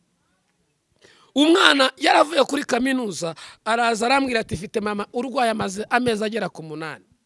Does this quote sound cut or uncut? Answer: uncut